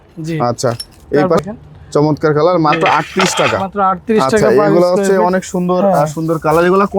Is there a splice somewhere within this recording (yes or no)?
yes